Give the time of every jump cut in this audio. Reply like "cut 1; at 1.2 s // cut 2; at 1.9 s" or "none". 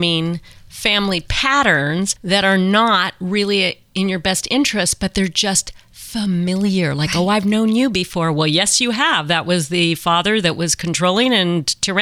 cut 1; at 2.2 s